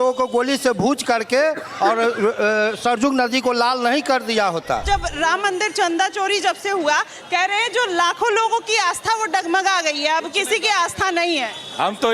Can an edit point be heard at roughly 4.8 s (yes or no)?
yes